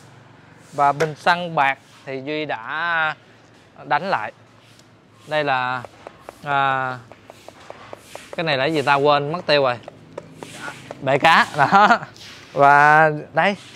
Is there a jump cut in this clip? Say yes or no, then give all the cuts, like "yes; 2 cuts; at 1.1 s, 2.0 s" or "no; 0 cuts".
no; 0 cuts